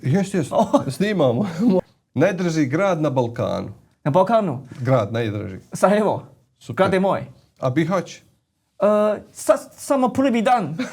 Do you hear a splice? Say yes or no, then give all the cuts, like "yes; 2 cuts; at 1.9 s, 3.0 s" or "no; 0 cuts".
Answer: yes; 1 cut; at 1.8 s